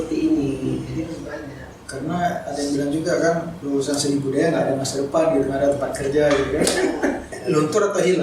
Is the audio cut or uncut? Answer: cut